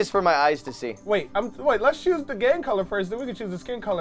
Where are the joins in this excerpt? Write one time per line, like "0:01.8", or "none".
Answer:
0:00.9